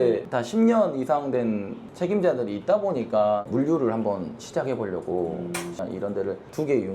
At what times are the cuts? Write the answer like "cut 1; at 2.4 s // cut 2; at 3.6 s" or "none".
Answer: cut 1; at 1.8 s // cut 2; at 3.5 s // cut 3; at 5.8 s